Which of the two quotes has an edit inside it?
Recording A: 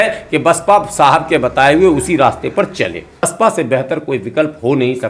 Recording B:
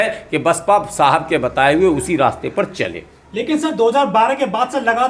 A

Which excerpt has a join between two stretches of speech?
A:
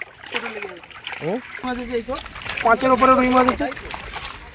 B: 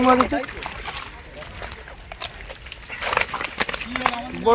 A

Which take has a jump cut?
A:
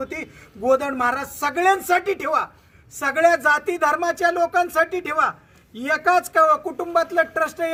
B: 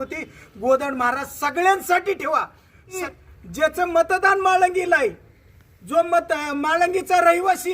B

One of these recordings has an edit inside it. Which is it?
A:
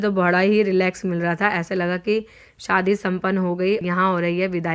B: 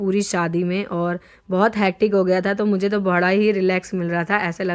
A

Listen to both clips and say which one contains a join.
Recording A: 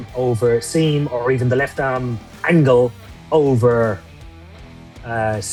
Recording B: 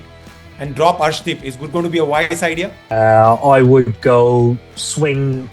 B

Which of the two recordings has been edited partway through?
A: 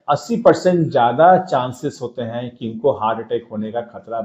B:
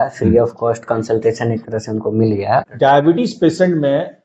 B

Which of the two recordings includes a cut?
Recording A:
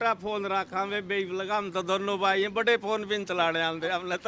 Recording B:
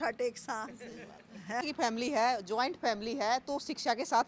B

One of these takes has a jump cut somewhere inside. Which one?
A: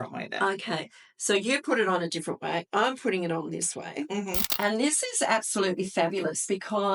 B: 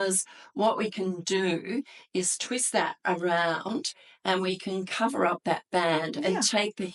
A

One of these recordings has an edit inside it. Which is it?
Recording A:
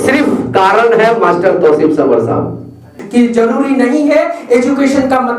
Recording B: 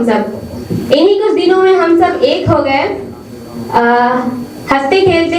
A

